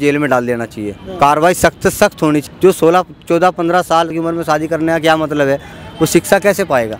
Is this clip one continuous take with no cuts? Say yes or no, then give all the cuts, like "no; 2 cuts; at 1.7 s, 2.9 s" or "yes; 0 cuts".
no; 2 cuts; at 2.4 s, 4.1 s